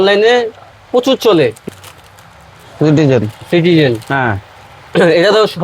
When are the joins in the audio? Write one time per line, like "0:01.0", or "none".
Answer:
0:01.6